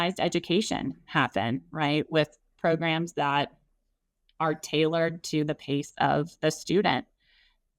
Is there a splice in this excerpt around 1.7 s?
no; 0 cuts

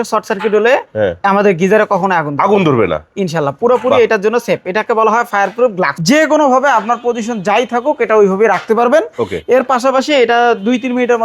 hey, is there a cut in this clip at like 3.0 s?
no; 1 cut; at 6.0 s

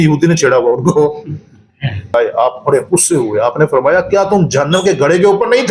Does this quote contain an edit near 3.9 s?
no; 1 cut; at 2.1 s

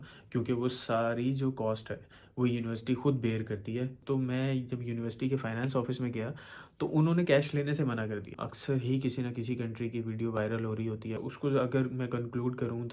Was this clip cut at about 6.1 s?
no; 3 cuts; at 3.9 s, 8.3 s, 11.1 s

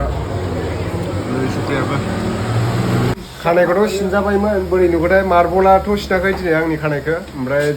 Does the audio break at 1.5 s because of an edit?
no; 1 cut; at 3.1 s

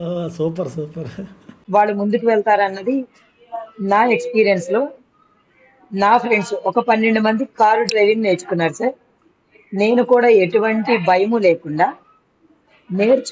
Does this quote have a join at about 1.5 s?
yes; 1 cut; at 1.5 s

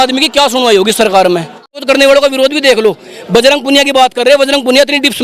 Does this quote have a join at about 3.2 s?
no; 1 cut; at 1.8 s

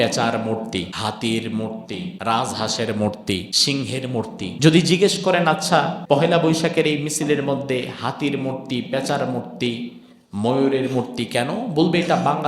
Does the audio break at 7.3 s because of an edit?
no; 5 cuts; at 0.9 s, 2.1 s, 3.5 s, 4.5 s, 6.0 s

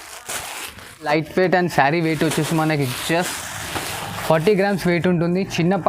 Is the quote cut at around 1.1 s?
yes; 1 cut; at 1.1 s

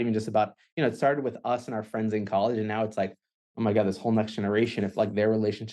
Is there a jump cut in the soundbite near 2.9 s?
no; 0 cuts

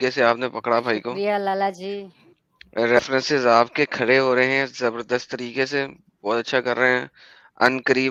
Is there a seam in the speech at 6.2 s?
no; 0 cuts

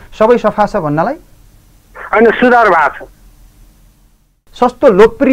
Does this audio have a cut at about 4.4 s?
yes; 1 cut; at 4.4 s

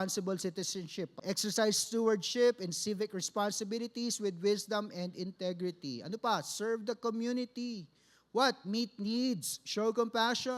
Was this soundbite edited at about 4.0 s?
no; 1 cut; at 1.2 s

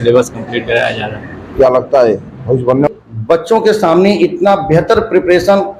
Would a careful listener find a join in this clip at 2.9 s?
yes; 1 cut; at 2.9 s

